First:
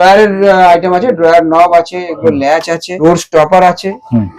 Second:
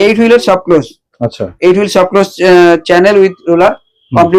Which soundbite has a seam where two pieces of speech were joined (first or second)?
first